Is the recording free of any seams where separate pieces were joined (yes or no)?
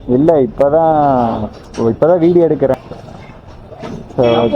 no